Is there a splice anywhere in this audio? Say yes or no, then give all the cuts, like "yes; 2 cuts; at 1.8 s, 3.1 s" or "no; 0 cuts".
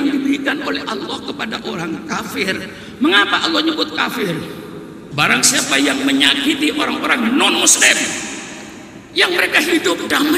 yes; 1 cut; at 5.0 s